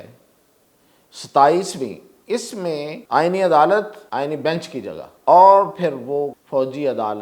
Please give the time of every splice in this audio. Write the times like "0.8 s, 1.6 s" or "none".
3.0 s, 4.0 s, 5.1 s, 6.4 s